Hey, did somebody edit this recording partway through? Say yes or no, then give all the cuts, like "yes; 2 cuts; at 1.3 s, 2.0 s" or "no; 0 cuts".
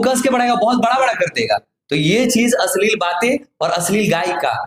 no; 0 cuts